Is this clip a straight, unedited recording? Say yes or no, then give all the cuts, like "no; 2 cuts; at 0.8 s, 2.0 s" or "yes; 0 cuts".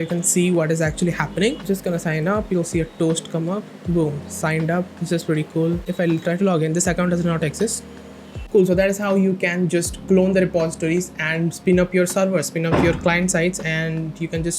no; 3 cuts; at 1.6 s, 5.9 s, 8.3 s